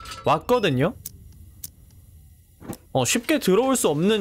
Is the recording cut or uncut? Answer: uncut